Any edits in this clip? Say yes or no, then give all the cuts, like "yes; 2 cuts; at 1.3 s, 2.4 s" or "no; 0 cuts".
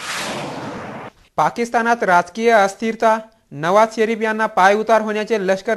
yes; 1 cut; at 1.2 s